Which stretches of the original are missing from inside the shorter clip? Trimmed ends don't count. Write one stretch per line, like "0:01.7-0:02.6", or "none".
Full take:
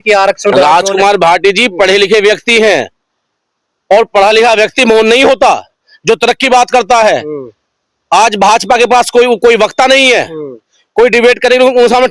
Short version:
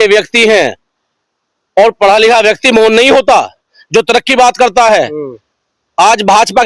none